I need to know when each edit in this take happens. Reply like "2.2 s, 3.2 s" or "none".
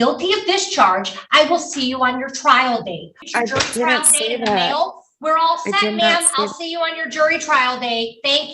3.1 s